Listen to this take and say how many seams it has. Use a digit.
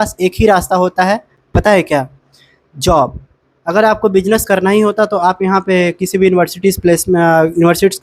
0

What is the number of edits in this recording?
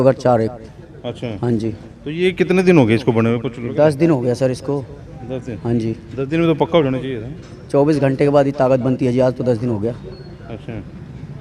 0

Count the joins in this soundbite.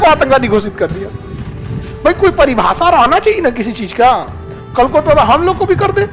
0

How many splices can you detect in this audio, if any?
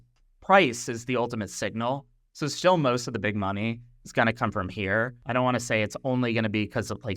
1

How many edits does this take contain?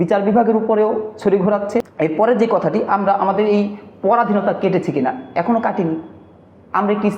1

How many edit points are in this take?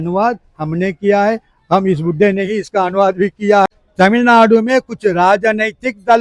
1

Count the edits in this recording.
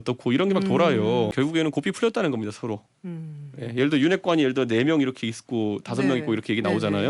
1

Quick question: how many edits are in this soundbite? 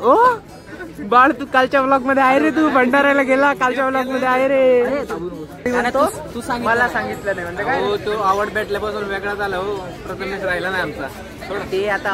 1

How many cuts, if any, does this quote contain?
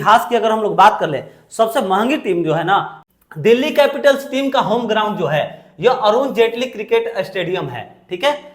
1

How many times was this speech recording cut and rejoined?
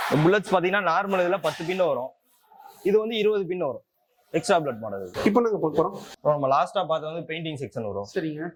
0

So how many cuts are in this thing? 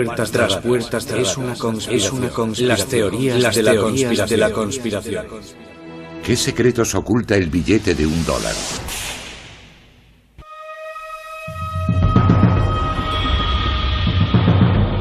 1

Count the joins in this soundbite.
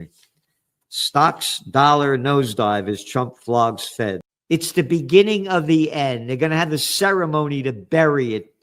1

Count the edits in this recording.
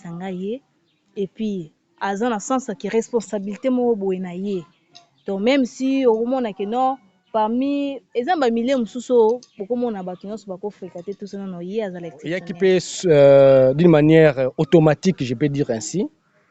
1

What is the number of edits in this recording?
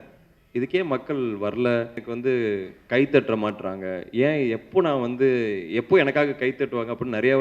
1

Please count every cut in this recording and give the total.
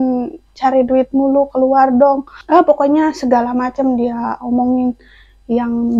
1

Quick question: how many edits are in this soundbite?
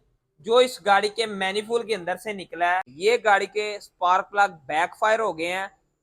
1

